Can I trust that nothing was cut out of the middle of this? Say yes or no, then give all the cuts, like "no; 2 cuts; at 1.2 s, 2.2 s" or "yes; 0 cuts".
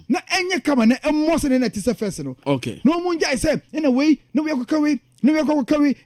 yes; 0 cuts